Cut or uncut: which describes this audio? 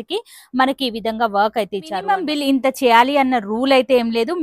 cut